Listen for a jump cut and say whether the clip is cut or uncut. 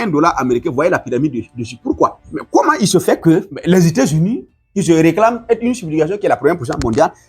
cut